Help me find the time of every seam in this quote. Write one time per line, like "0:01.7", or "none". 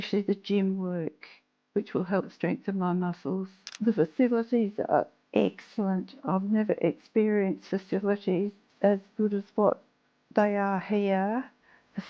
0:03.6
0:08.6